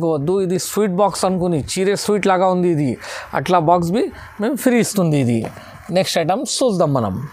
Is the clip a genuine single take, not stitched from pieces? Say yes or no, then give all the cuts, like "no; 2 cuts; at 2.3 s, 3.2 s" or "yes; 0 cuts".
yes; 0 cuts